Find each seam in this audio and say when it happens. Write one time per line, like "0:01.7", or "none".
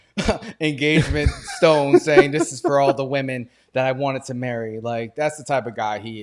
none